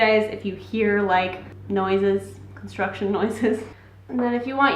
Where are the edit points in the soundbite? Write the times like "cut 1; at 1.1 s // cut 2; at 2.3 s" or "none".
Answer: cut 1; at 3.7 s